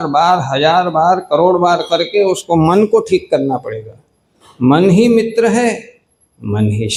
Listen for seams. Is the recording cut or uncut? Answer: uncut